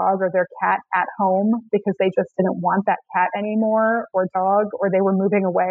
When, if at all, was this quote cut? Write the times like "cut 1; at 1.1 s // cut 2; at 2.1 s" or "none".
none